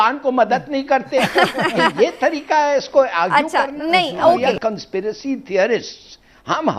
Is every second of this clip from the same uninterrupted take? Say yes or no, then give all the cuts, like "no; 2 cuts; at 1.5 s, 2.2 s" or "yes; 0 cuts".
yes; 0 cuts